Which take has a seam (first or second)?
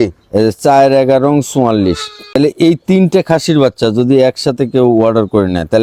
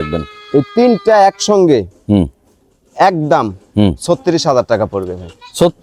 first